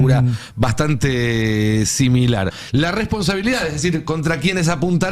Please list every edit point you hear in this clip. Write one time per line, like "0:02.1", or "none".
0:02.6

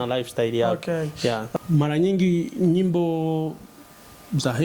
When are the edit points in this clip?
0:01.5

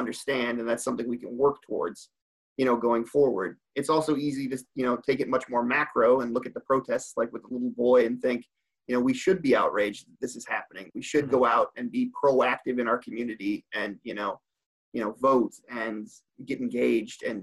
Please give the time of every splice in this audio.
0:16.3

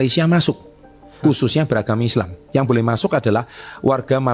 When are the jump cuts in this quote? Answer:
none

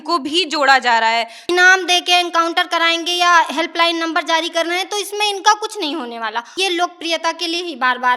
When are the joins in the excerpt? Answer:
0:01.4
0:06.5

